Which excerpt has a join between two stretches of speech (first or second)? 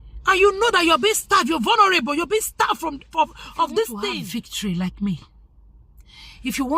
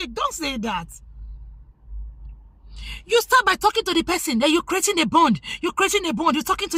first